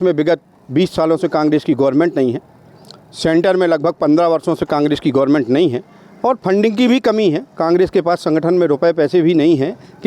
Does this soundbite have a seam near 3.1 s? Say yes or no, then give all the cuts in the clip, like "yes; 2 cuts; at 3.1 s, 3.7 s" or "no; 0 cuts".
no; 0 cuts